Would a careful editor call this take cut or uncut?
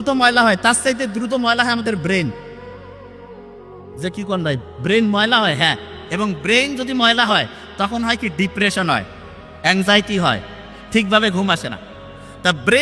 uncut